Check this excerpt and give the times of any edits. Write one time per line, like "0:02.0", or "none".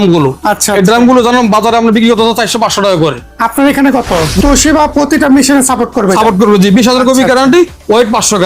0:04.4